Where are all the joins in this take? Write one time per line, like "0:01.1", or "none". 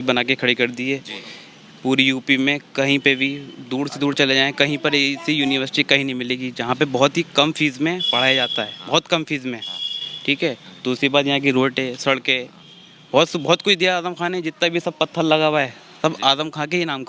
none